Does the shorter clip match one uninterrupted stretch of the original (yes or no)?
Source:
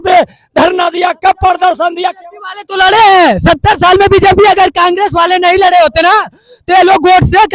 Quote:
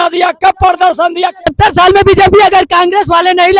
no